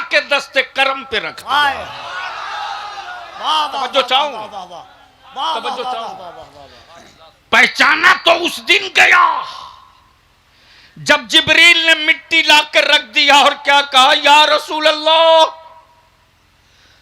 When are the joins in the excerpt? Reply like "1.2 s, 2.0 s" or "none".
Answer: none